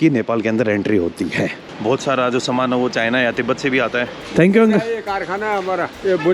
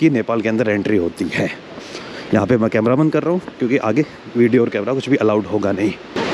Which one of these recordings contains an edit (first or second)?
first